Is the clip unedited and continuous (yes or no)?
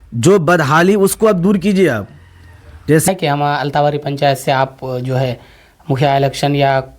no